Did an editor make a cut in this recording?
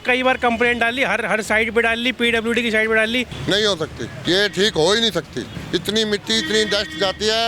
yes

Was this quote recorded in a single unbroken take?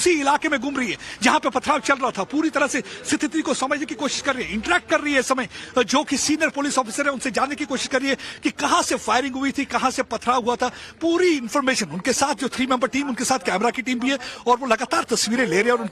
yes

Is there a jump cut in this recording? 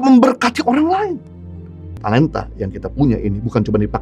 yes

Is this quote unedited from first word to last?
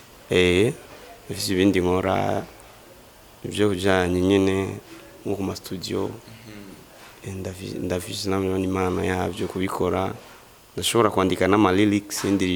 yes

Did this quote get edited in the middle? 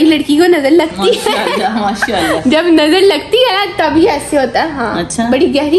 yes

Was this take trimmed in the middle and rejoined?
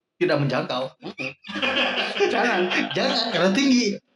no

